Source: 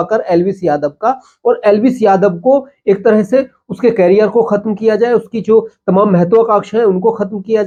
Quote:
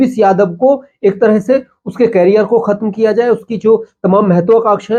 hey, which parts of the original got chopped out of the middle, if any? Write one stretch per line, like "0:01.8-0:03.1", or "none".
none

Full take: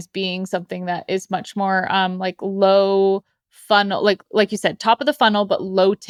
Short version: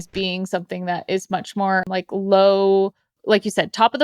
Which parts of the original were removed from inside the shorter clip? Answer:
0:01.9-0:02.2
0:03.5-0:04.2

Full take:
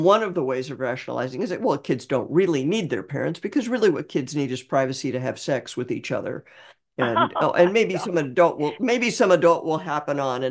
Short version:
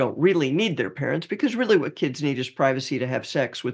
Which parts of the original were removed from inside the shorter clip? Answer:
none

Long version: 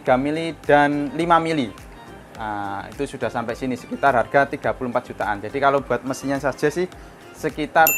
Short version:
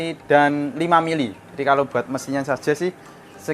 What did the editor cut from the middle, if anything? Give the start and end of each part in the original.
0:01.9-0:05.5

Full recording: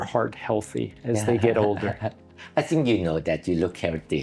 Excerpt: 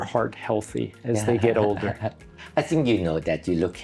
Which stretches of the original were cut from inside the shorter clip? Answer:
none

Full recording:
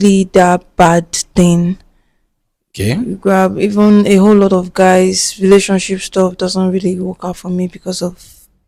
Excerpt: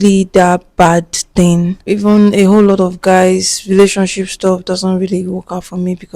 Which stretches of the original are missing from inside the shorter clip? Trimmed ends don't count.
0:01.8-0:03.5

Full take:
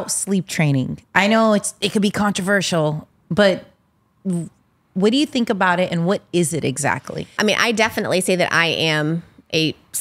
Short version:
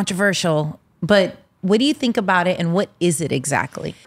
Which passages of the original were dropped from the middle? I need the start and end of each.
0:03.7-0:04.8

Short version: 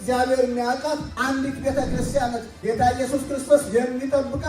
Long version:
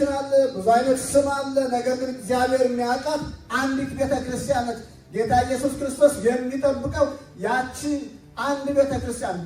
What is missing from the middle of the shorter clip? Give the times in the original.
0:03.3-0:03.5
0:04.8-0:05.0

